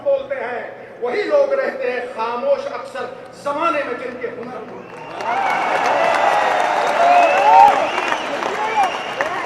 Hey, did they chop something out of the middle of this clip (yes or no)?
no